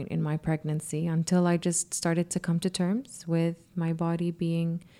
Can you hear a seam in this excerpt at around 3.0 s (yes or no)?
no